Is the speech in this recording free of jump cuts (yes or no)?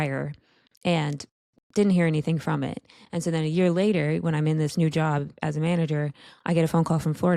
yes